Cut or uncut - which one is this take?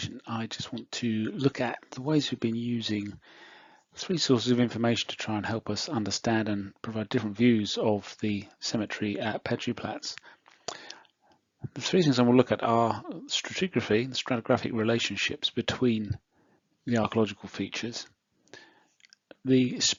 uncut